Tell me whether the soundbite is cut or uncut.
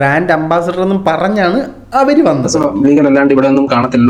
cut